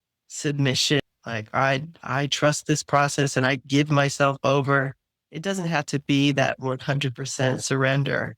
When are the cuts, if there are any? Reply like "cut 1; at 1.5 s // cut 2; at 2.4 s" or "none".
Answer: cut 1; at 1.4 s